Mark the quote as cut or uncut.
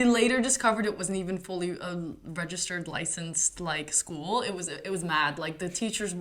uncut